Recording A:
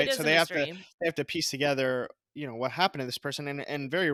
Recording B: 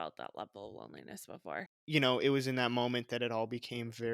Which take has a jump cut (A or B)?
B